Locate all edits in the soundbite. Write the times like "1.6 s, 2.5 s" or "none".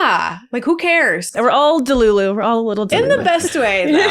1.3 s, 2.9 s

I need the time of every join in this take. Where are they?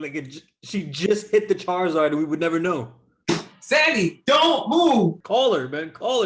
5.2 s

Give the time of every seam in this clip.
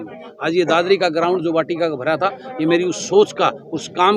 none

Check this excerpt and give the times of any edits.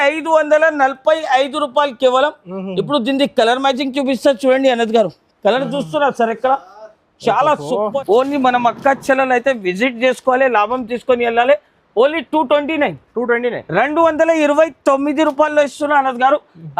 7.9 s

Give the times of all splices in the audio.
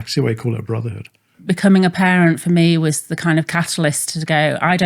1.3 s

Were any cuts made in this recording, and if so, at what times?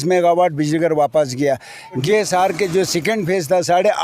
2.0 s

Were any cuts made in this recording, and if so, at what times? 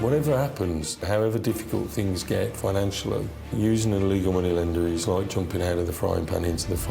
1.0 s, 3.5 s

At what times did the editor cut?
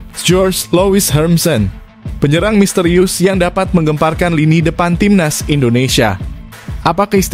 none

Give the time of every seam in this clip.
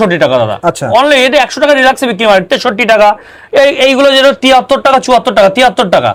none

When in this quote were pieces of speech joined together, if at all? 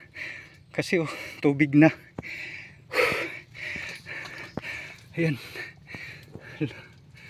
none

